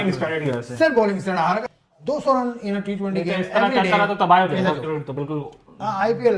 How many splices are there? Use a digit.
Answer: 1